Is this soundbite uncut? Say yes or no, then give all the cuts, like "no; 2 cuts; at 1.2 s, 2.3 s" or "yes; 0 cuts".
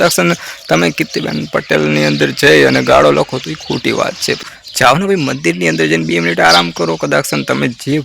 no; 1 cut; at 4.2 s